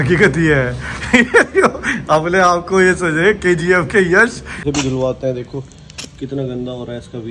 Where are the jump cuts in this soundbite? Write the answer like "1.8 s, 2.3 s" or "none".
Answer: 4.6 s